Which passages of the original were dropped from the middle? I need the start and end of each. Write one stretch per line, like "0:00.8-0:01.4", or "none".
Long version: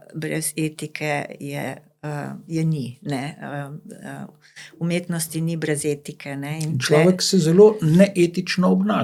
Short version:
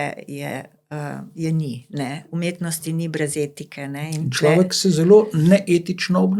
0:03.3-0:04.7